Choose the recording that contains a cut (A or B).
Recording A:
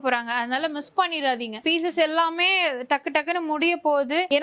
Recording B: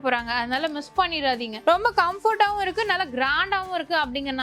B